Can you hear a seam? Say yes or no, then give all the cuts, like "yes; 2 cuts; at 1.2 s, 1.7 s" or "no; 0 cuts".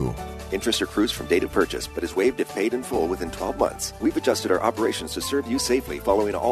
yes; 1 cut; at 3.9 s